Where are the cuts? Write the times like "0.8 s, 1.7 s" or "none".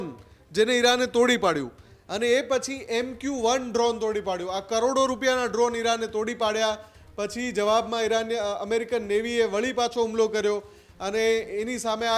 none